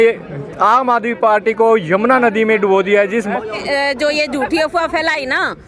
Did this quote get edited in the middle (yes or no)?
yes